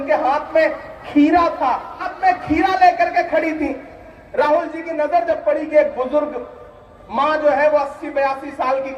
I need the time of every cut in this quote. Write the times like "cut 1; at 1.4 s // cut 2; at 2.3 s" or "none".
cut 1; at 2.0 s

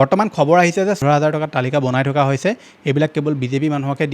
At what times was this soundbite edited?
cut 1; at 1.0 s

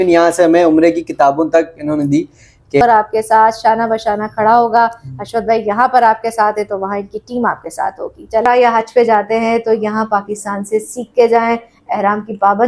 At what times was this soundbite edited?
cut 1; at 2.8 s // cut 2; at 8.4 s

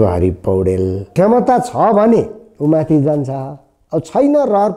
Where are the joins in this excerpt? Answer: cut 1; at 1.0 s

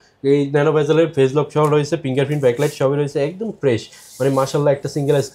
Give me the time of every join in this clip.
none

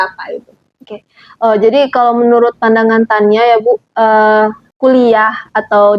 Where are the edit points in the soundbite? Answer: cut 1; at 4.7 s

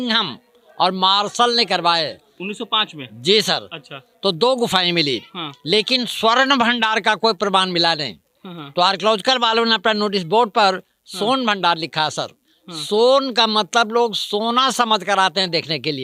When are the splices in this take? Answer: none

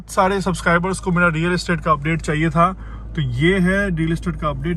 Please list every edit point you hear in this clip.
none

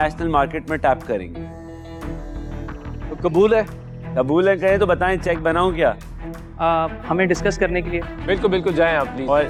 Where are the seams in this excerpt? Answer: none

